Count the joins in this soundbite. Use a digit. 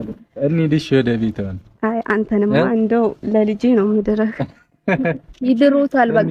0